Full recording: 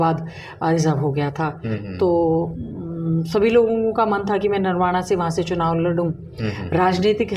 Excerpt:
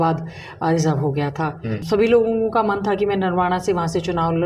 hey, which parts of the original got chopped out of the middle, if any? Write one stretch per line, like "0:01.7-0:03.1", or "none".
0:01.8-0:03.3